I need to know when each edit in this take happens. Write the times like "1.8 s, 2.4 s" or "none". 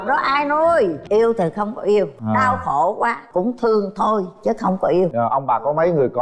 1.0 s, 2.2 s, 3.2 s, 5.1 s